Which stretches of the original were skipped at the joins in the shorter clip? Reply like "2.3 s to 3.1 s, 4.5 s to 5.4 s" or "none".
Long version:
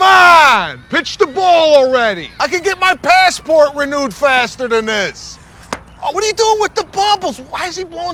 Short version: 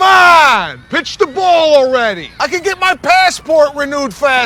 none